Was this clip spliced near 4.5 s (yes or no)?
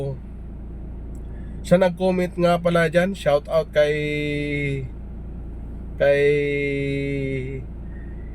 no